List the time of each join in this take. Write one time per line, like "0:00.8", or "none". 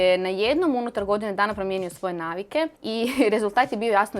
0:02.8